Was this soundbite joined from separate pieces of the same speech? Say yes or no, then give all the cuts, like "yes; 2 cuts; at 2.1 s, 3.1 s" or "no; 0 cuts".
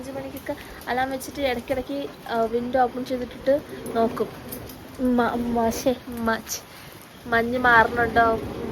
no; 0 cuts